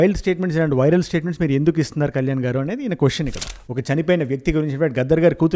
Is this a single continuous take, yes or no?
no